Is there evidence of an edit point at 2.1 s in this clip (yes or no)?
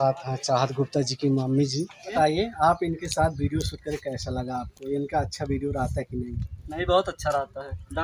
yes